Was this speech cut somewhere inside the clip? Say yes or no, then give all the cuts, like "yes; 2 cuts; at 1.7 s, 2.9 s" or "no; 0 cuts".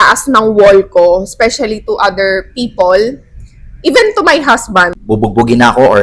yes; 1 cut; at 5.0 s